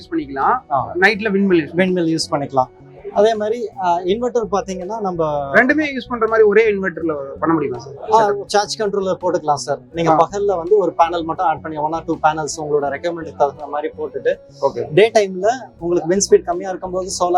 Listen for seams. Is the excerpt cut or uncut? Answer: uncut